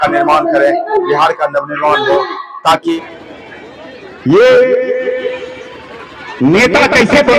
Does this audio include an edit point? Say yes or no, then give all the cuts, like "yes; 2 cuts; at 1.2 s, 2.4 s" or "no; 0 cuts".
yes; 1 cut; at 2.9 s